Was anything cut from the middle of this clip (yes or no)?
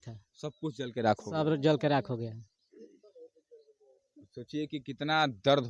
no